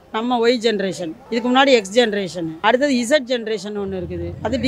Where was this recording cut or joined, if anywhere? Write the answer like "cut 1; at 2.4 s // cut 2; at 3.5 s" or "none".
cut 1; at 1.1 s // cut 2; at 2.4 s